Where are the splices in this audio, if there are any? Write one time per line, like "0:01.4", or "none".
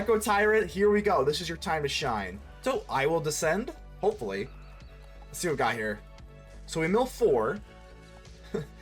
0:02.4